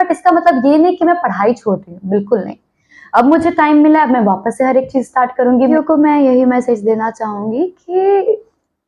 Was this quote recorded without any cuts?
no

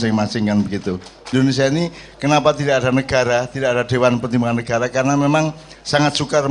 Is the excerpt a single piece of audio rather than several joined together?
no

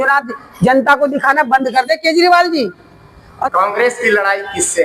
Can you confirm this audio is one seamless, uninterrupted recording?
no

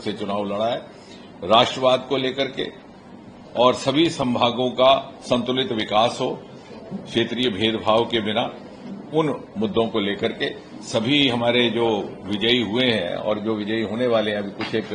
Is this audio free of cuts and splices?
yes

